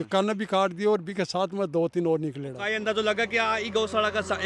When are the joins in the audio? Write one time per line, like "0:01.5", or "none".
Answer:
0:02.6